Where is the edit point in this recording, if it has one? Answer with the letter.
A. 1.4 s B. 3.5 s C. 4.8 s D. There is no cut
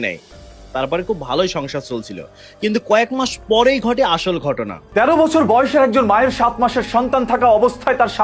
C